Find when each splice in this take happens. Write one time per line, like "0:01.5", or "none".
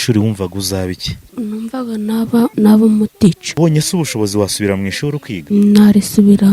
0:01.3
0:02.5
0:03.5
0:05.3